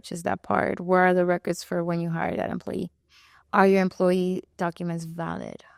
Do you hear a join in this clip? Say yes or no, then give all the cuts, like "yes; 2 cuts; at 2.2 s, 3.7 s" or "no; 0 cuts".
no; 0 cuts